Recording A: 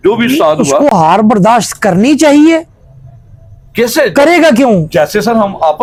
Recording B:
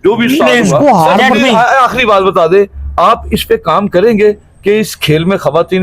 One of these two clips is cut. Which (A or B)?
B